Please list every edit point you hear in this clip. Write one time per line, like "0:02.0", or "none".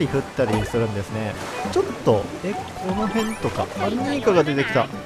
0:01.4